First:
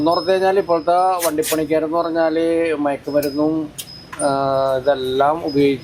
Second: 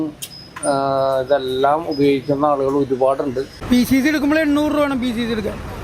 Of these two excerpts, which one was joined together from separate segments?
second; 1 cut; at 3.5 s

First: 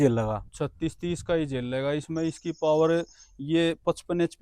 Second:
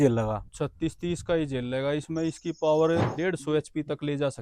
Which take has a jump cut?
second; 1 cut; at 3.1 s

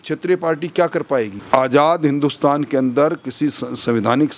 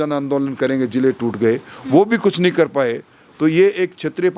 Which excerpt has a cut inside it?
first; 1 cut; at 1.4 s

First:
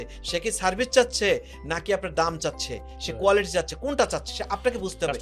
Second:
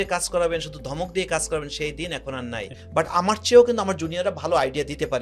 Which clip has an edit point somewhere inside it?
second; 1 cut; at 2.7 s

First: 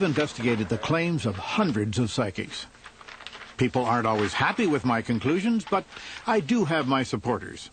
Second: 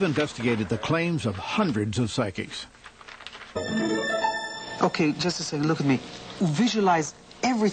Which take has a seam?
first; 1 cut; at 3.6 s

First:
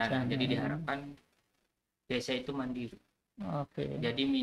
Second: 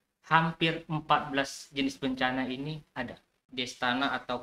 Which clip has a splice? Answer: second; 1 cut; at 3.5 s

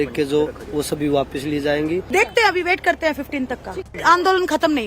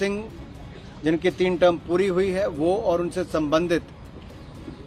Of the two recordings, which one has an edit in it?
first; 2 cuts; at 2.1 s, 3.9 s

